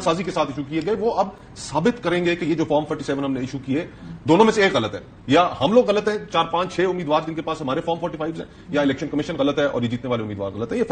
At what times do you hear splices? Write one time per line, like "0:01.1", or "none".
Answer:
none